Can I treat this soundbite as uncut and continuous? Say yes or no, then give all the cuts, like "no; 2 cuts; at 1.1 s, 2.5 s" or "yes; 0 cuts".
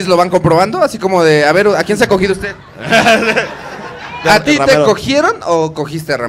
no; 1 cut; at 4.2 s